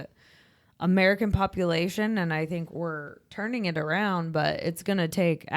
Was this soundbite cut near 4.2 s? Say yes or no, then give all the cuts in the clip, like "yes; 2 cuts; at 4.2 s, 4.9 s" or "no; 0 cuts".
no; 1 cut; at 2.7 s